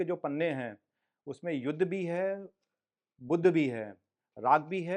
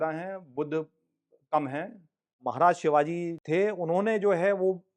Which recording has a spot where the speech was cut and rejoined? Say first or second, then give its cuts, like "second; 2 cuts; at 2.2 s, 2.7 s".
second; 1 cut; at 2.4 s